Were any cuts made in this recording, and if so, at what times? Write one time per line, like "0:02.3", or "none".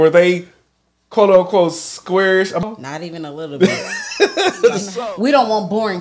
0:02.6
0:04.8